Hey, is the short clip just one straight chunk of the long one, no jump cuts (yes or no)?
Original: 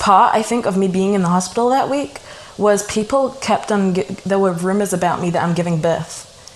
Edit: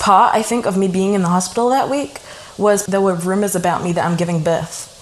no